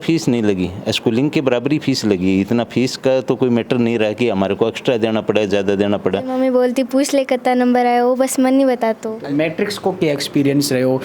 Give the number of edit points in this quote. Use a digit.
2